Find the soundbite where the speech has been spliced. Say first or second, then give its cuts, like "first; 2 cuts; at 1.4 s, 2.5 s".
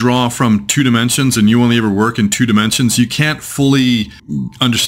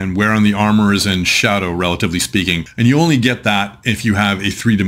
second; 1 cut; at 2.7 s